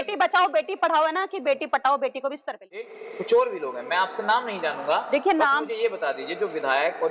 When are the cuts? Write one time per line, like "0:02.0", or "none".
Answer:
0:02.8